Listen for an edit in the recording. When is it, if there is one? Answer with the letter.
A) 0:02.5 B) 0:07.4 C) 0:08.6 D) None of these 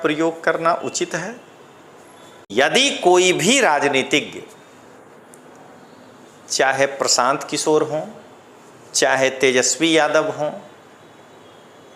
A